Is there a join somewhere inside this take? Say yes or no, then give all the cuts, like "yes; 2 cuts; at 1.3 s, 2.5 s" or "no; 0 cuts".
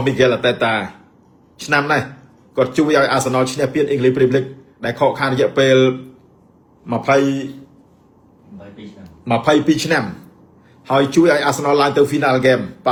no; 0 cuts